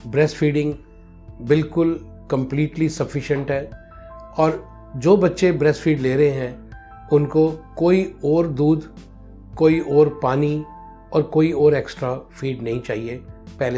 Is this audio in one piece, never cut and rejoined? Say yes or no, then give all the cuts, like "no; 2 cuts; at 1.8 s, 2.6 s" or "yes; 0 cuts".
yes; 0 cuts